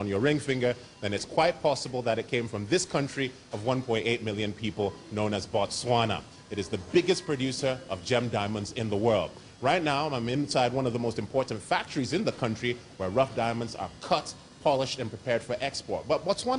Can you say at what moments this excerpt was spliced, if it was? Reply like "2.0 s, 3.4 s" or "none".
6.8 s